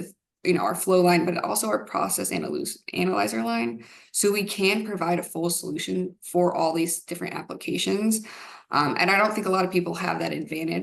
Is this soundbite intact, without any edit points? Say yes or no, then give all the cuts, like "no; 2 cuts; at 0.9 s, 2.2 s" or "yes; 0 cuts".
yes; 0 cuts